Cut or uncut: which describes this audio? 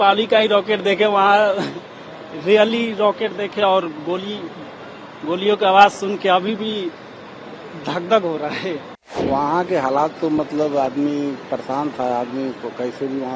cut